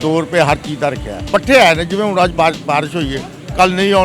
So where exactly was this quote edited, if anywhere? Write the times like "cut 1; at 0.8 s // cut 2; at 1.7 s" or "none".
cut 1; at 1.1 s